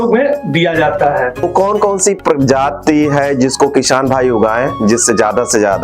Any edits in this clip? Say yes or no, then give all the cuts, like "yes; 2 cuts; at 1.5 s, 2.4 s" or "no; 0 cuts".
yes; 1 cut; at 1.4 s